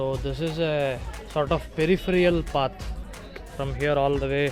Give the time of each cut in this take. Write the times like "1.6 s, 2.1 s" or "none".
1.1 s